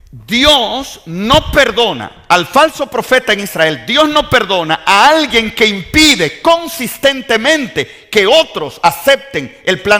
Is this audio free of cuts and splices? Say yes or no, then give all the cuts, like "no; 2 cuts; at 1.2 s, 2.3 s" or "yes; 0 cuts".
yes; 0 cuts